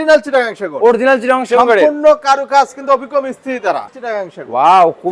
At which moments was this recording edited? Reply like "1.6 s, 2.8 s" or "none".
3.9 s